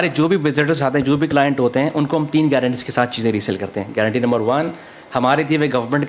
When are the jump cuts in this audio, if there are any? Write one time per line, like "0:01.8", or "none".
none